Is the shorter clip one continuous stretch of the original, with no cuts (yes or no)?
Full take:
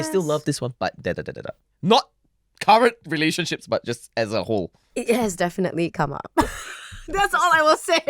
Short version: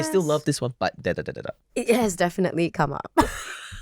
no